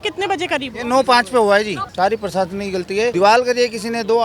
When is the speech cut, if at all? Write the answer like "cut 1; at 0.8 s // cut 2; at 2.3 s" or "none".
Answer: cut 1; at 1.8 s // cut 2; at 3.1 s

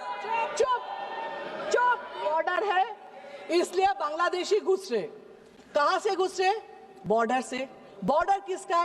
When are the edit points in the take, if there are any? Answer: cut 1; at 2.2 s

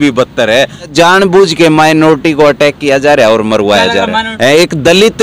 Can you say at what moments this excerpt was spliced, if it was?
cut 1; at 0.9 s // cut 2; at 4.3 s

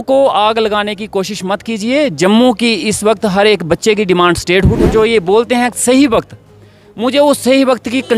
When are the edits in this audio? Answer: cut 1; at 4.9 s

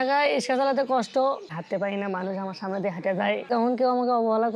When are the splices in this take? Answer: cut 1; at 1.5 s // cut 2; at 3.4 s

